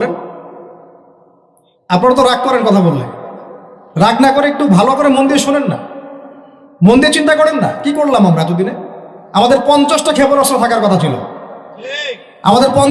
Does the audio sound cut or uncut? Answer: uncut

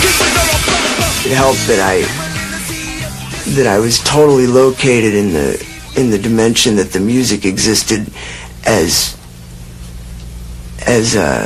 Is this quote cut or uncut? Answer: cut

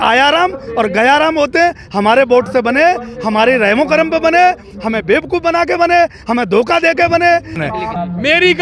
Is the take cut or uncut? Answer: cut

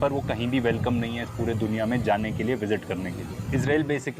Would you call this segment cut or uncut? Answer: uncut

